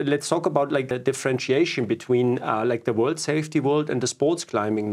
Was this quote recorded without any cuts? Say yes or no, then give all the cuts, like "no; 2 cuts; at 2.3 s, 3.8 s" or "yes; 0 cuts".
no; 1 cut; at 0.9 s